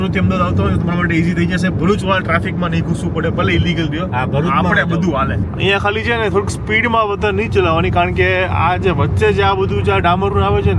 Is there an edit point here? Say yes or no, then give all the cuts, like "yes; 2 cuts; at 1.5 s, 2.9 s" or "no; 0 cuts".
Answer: yes; 1 cut; at 5.4 s